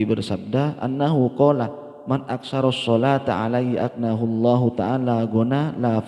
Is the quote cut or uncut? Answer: uncut